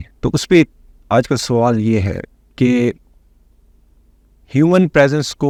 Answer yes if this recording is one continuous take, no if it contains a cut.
yes